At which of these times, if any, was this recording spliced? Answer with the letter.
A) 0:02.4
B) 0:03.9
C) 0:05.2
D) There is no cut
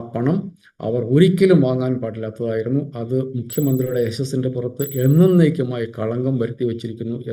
D